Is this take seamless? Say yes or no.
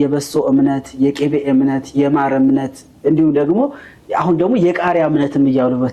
yes